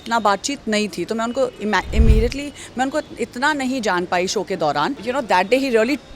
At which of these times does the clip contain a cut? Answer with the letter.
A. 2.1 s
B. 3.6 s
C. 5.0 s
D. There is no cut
C